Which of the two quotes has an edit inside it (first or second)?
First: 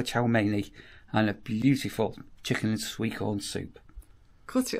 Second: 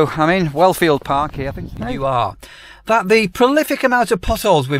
second